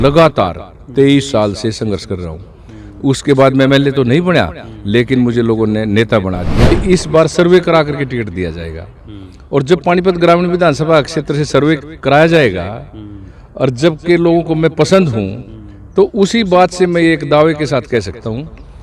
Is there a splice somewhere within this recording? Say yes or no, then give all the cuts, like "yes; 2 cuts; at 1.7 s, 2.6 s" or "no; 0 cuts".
yes; 1 cut; at 6.7 s